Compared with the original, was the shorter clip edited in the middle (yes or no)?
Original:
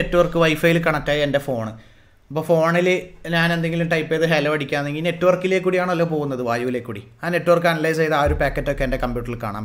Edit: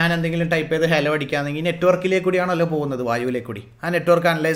no